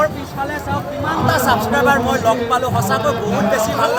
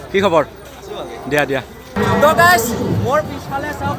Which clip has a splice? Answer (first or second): second